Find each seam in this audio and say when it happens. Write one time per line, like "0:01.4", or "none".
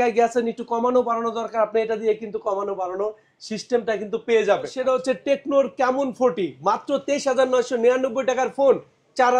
0:04.8